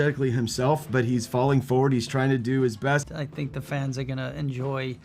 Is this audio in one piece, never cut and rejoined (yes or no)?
no